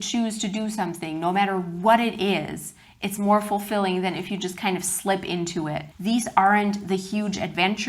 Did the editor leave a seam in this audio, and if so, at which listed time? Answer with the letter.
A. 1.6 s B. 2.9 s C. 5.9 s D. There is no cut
C